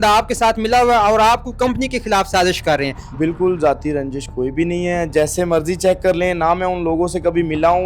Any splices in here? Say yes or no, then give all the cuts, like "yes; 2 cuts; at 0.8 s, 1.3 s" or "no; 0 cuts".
yes; 1 cut; at 3.0 s